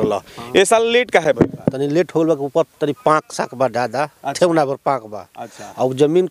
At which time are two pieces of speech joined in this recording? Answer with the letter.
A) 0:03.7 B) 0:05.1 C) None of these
C